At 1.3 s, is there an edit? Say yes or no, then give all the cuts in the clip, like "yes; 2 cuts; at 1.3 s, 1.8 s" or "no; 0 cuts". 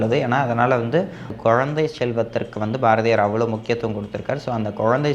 yes; 1 cut; at 1.3 s